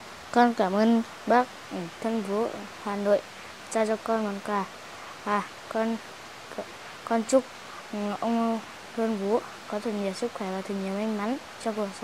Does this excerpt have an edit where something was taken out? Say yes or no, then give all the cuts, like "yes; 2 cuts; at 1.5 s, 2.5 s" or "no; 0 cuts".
no; 0 cuts